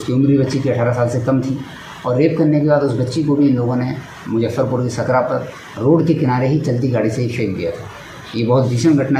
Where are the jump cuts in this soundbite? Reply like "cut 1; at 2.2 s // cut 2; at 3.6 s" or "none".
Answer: none